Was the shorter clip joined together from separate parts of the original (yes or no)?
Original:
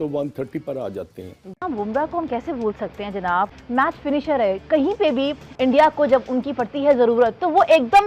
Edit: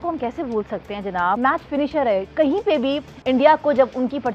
yes